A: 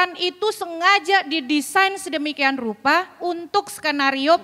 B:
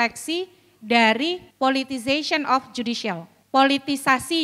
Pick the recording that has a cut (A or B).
B